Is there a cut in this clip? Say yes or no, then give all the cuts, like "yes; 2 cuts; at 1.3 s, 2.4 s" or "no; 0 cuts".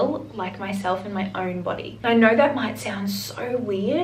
no; 0 cuts